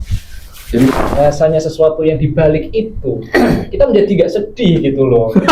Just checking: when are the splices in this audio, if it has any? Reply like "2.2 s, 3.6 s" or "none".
0.9 s